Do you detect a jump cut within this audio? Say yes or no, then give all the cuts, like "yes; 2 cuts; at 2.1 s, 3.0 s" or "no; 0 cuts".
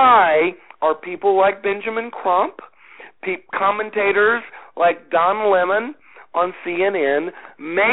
no; 0 cuts